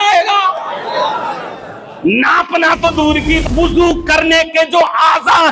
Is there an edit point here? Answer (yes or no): yes